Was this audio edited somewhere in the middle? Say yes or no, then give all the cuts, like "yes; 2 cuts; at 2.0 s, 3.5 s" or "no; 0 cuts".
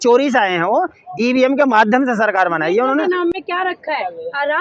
no; 0 cuts